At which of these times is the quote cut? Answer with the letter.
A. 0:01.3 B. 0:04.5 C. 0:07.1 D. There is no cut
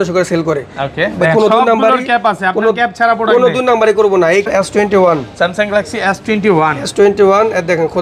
B